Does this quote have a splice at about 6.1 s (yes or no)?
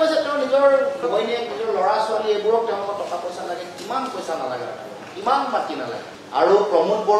yes